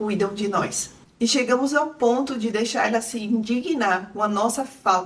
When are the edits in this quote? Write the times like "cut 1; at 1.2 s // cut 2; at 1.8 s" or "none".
cut 1; at 1.0 s